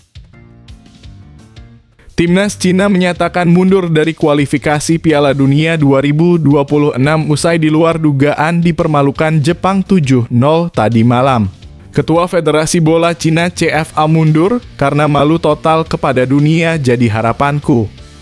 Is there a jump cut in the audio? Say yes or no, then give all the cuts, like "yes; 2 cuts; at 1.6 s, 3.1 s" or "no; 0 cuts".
yes; 1 cut; at 2.1 s